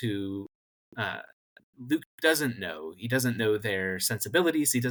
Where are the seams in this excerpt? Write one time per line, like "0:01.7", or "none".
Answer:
none